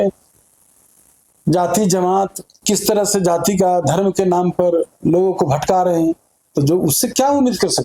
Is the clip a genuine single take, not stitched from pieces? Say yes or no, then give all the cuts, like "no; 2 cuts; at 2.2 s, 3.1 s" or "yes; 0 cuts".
yes; 0 cuts